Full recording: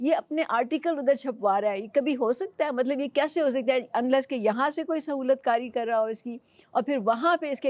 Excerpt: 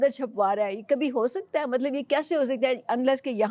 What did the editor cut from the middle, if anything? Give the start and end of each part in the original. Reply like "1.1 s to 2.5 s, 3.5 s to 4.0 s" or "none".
none